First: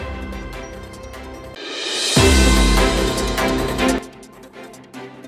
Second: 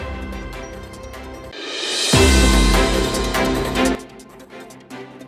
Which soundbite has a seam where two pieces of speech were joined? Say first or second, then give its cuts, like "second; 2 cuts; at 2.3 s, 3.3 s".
second; 2 cuts; at 1.5 s, 4.0 s